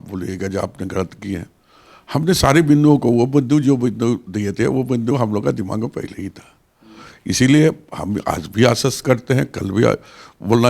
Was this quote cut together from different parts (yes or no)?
no